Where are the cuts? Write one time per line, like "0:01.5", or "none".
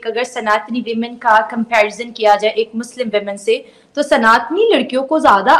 none